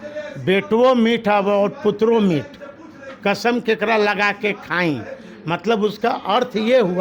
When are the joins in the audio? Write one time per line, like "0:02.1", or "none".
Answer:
none